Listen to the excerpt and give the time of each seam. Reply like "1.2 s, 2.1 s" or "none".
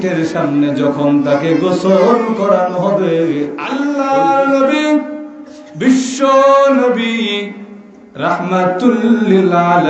3.6 s